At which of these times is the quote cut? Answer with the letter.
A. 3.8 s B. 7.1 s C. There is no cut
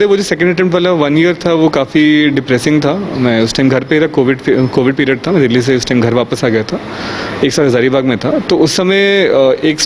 C